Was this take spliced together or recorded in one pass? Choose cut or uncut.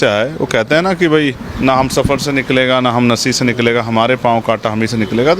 cut